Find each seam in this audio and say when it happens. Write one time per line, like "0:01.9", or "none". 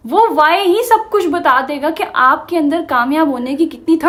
none